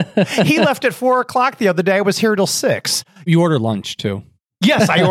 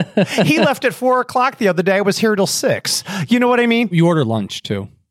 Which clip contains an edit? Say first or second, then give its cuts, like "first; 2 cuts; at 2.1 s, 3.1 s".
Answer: first; 1 cut; at 3.2 s